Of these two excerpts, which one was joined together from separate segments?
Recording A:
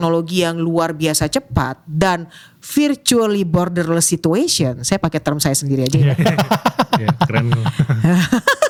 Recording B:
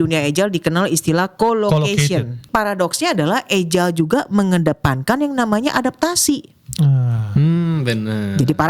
B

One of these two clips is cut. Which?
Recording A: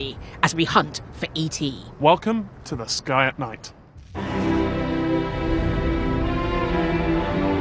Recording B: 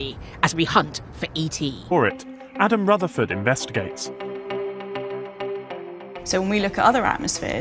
A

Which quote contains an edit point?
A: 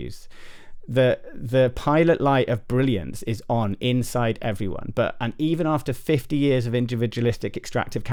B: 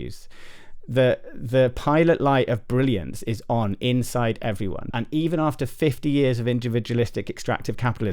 B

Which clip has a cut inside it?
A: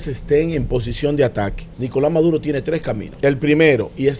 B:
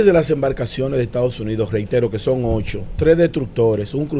A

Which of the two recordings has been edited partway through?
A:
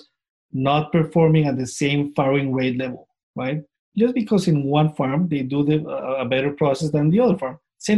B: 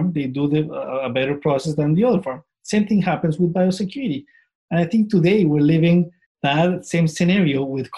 B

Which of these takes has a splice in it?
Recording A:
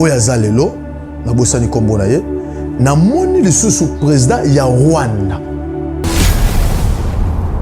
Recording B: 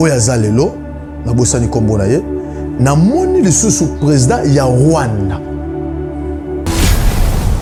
A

